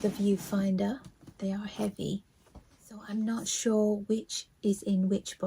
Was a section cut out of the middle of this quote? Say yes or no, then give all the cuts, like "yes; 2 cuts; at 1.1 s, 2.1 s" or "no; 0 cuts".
yes; 1 cut; at 2.2 s